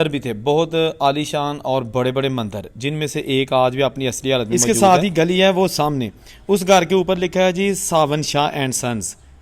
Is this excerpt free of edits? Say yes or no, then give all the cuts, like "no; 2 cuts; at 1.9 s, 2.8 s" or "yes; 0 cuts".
no; 1 cut; at 4.5 s